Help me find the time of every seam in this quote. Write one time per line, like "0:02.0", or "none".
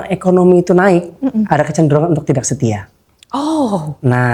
none